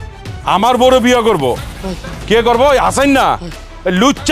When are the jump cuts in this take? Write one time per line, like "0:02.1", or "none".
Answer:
0:01.9